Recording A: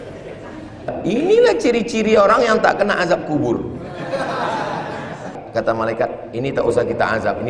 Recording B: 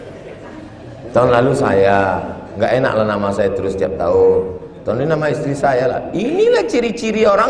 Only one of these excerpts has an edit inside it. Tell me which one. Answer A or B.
A